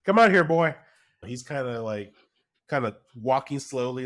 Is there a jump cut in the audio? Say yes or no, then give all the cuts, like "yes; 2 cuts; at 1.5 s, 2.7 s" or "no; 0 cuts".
yes; 1 cut; at 1.2 s